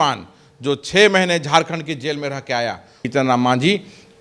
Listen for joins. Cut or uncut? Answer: cut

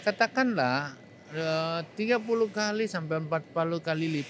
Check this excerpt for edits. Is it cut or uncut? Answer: uncut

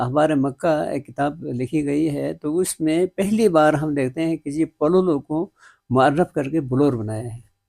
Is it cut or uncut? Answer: uncut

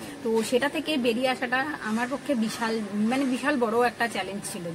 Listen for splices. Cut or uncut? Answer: uncut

